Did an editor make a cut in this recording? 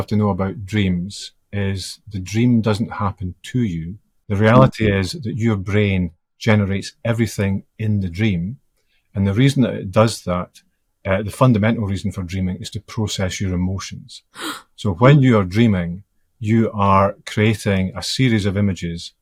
no; 0 cuts

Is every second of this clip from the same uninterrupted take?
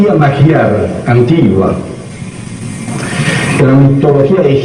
yes; 0 cuts

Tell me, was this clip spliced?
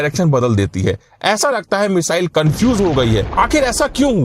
yes; 1 cut; at 3.3 s

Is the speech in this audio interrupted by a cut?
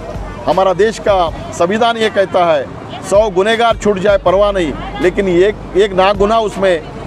no; 0 cuts

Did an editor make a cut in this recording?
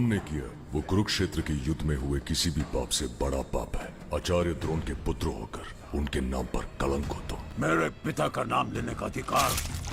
no; 0 cuts

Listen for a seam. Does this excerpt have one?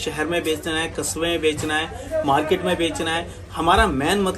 no; 0 cuts

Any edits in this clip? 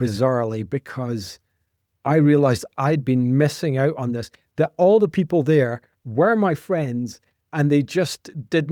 no; 0 cuts

